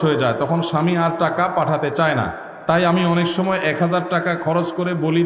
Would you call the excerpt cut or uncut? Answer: uncut